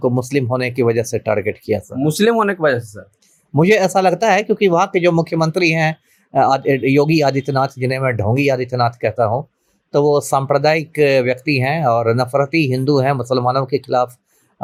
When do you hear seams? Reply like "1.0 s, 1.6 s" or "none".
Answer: none